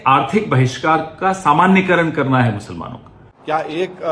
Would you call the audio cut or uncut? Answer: uncut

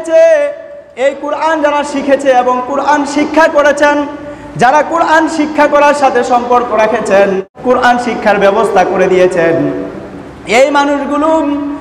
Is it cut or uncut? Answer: cut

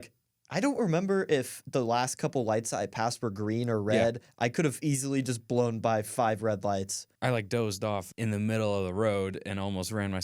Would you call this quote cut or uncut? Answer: cut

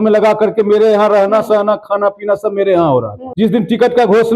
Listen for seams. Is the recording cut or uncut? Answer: cut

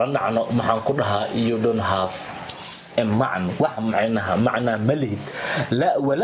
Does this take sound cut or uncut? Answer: uncut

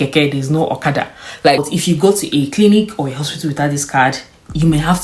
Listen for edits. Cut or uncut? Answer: cut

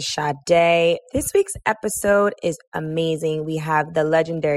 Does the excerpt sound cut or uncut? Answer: cut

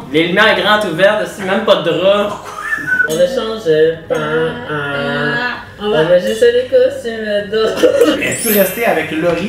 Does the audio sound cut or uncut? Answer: cut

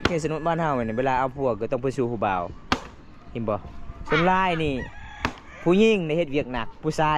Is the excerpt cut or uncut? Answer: uncut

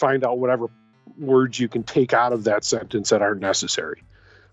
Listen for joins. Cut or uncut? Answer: uncut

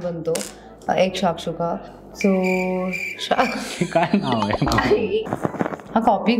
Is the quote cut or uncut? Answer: cut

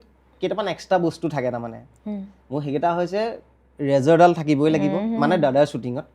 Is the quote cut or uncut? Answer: uncut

